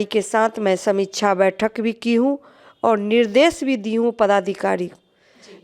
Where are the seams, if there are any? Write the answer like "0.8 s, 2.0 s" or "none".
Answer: none